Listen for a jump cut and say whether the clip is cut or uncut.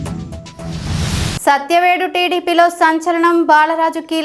cut